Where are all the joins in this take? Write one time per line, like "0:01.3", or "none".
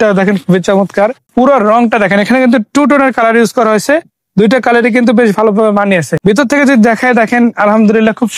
0:01.2
0:06.1